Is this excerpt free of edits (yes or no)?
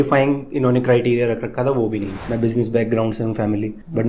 no